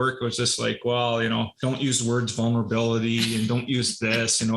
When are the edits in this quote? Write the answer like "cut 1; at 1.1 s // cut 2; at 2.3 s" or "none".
cut 1; at 1.5 s